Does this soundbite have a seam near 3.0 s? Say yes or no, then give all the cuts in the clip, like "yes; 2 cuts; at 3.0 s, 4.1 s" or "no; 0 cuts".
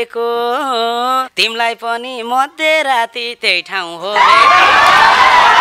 no; 1 cut; at 1.4 s